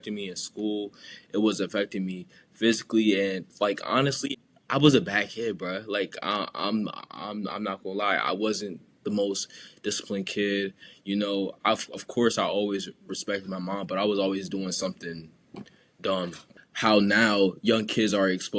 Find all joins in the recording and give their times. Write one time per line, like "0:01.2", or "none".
0:16.4